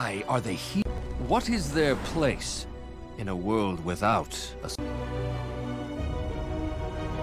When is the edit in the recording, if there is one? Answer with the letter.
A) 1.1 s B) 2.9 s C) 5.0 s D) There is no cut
A